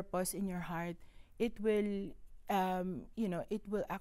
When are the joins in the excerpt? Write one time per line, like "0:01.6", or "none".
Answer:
none